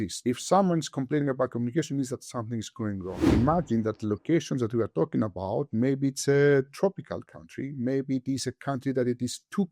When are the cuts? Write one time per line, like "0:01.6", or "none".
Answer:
0:03.3